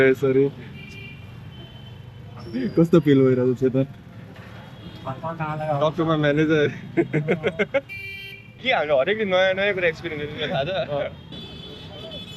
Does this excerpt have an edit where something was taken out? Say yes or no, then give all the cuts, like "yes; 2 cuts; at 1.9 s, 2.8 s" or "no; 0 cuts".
yes; 1 cut; at 11.3 s